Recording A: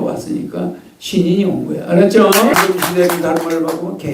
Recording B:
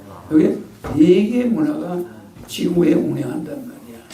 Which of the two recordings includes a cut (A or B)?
A